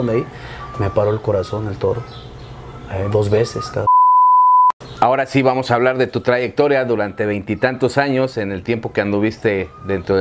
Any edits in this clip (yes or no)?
no